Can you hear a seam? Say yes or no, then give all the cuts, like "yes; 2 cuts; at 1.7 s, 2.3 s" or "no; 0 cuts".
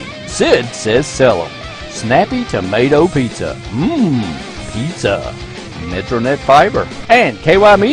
yes; 1 cut; at 6.9 s